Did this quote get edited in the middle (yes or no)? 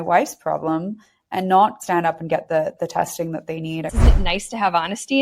yes